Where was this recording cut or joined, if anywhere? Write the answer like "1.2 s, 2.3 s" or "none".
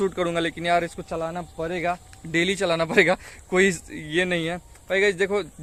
none